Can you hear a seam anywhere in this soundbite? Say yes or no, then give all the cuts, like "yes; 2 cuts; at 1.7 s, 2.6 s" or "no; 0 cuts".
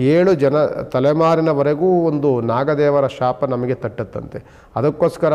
no; 0 cuts